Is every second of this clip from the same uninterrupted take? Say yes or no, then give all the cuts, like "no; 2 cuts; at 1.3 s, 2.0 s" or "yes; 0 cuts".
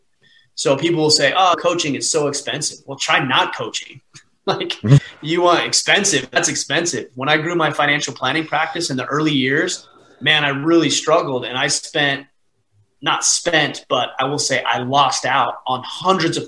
yes; 0 cuts